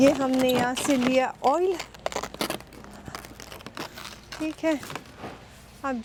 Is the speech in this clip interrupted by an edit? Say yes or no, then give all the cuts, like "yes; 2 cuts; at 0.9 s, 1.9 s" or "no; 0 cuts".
no; 0 cuts